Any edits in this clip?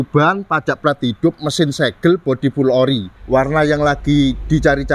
yes; 1 cut; at 3.1 s

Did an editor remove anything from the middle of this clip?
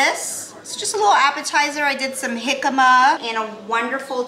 yes; 1 cut; at 3.2 s

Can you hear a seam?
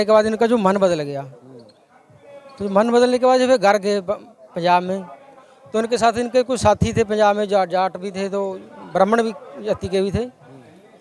no; 0 cuts

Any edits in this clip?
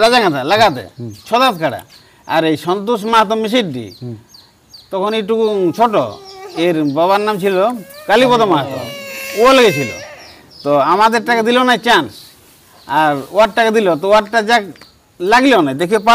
no; 0 cuts

